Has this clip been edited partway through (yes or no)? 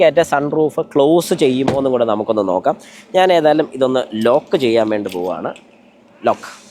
no